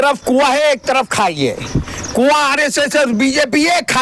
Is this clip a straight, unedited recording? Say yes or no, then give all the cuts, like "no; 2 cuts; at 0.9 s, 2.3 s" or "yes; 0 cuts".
yes; 0 cuts